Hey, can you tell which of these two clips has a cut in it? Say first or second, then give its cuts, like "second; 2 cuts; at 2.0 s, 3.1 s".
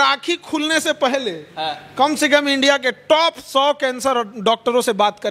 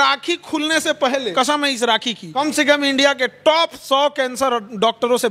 second; 2 cuts; at 1.3 s, 2.2 s